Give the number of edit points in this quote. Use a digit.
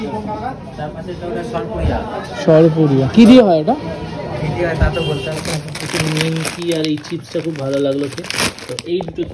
1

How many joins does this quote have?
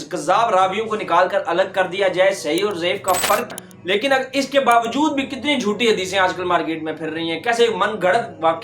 1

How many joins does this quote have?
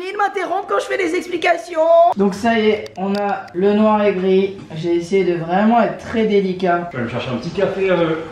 2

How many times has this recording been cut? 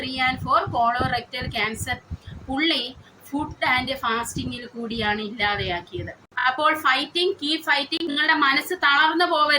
2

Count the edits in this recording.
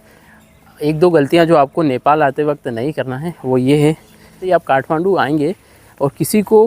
1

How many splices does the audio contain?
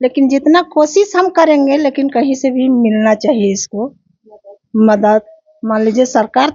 0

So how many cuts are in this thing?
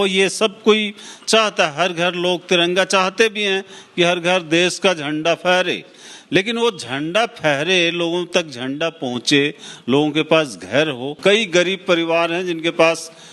1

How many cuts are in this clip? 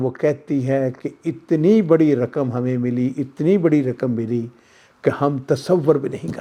0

